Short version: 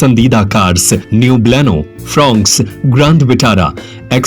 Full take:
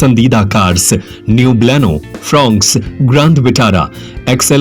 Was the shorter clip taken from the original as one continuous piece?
no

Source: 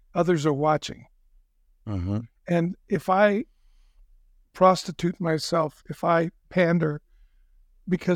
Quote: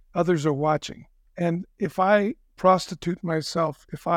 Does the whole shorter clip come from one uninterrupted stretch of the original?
no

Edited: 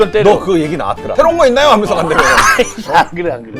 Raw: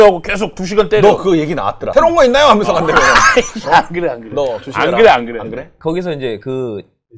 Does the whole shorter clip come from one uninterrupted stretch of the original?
yes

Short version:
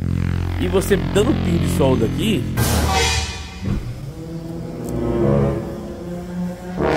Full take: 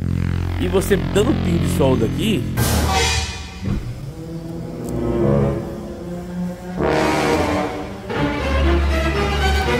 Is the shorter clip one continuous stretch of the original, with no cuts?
yes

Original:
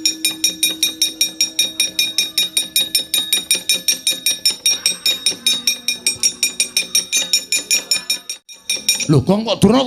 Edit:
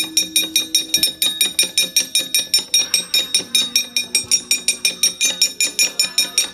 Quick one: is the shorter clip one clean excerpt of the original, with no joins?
no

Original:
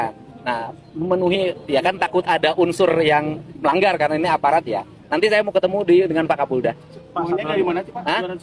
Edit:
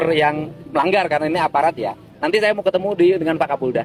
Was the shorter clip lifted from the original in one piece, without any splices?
yes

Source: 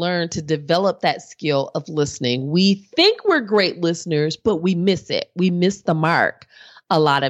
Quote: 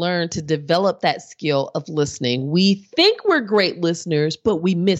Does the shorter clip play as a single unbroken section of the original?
yes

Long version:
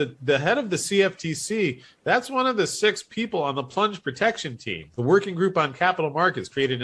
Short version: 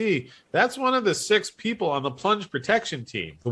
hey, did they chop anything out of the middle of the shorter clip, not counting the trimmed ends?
no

